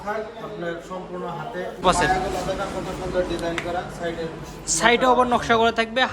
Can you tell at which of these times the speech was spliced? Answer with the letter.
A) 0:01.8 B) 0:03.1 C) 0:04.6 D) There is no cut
A